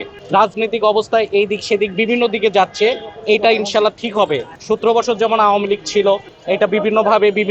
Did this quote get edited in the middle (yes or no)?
no